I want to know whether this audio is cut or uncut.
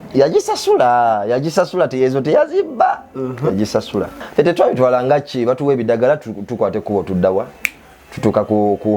cut